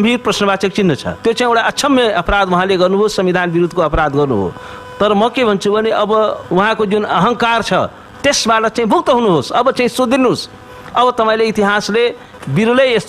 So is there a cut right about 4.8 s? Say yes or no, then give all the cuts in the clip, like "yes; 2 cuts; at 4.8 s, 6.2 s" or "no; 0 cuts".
no; 2 cuts; at 1.1 s, 6.4 s